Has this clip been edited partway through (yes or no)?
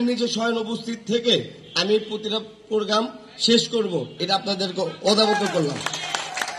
no